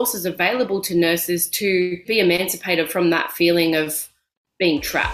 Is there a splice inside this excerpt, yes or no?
yes